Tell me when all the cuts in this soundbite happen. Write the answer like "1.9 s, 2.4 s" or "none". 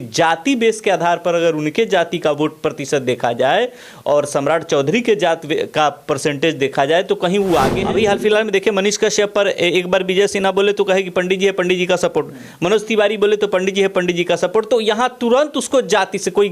7.8 s